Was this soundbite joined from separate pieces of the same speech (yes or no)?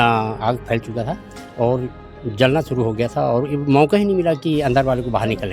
no